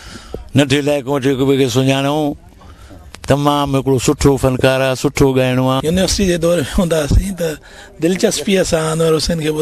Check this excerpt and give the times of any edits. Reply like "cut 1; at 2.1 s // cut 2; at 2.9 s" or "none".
cut 1; at 5.8 s